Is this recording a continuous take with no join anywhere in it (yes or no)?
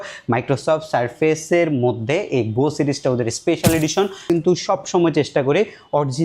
no